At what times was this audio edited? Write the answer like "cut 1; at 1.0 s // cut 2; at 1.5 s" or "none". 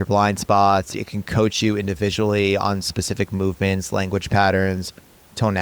cut 1; at 0.9 s